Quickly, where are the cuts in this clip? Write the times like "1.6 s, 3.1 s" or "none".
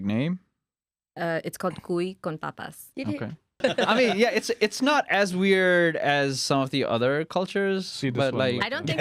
3.6 s